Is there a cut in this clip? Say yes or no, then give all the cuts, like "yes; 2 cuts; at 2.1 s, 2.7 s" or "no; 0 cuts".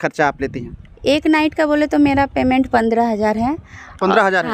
no; 0 cuts